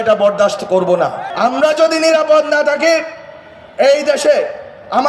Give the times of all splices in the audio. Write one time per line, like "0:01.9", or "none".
0:01.3